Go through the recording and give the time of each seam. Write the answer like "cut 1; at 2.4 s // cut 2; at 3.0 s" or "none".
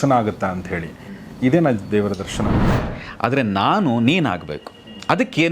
cut 1; at 2.7 s